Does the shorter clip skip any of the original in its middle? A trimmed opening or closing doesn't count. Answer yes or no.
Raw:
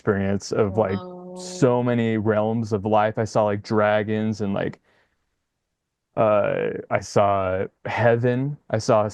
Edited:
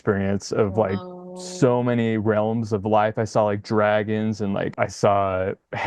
yes